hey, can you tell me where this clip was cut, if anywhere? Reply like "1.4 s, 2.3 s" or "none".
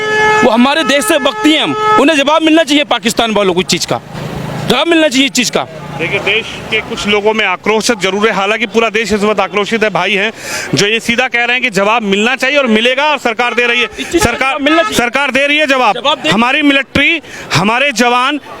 none